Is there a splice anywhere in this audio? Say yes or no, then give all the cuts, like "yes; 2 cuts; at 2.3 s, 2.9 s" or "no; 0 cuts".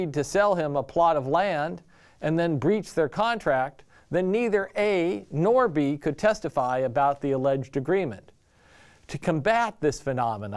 no; 0 cuts